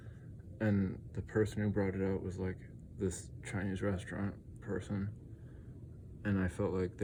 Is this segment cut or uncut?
uncut